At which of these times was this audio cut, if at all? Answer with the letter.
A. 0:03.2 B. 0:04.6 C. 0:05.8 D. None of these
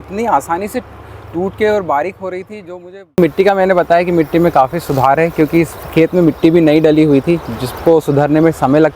A